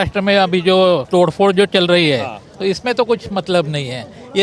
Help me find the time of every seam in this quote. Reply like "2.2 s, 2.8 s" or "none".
1.0 s